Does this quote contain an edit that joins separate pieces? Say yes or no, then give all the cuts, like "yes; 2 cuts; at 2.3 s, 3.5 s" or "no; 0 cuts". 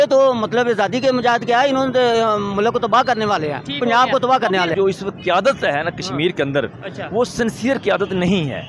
yes; 1 cut; at 4.7 s